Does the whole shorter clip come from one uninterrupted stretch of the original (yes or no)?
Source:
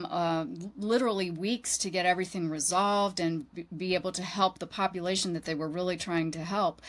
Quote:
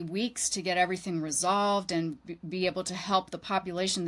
yes